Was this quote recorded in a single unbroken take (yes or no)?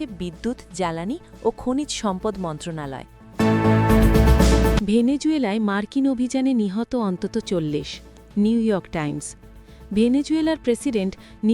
no